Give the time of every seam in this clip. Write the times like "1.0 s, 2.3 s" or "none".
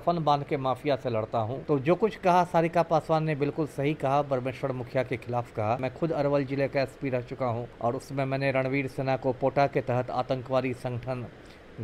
1.6 s, 5.9 s, 7.7 s